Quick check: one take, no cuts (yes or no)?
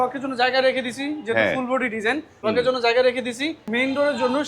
no